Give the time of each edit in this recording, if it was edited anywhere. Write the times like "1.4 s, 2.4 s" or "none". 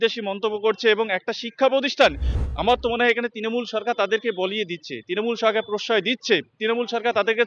2.3 s